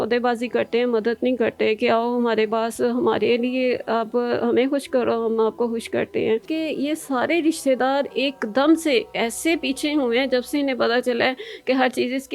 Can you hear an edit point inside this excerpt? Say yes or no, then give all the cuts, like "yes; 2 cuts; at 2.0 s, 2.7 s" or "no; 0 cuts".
yes; 1 cut; at 6.5 s